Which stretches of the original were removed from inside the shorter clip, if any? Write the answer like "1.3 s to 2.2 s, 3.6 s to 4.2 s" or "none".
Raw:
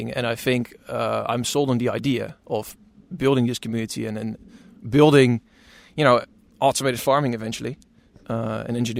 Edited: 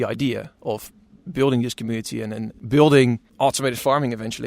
4.4 s to 4.7 s, 5.5 s to 6.5 s